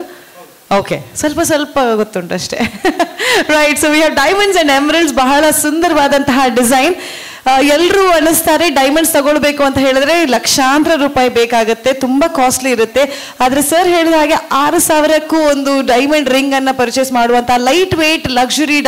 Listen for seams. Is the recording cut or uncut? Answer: uncut